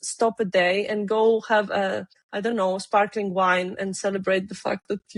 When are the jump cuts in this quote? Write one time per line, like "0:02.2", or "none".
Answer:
none